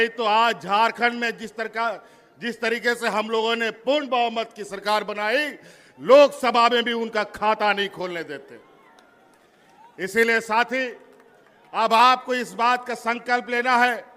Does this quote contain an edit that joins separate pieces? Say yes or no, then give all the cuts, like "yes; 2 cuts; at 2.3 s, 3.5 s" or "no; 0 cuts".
no; 0 cuts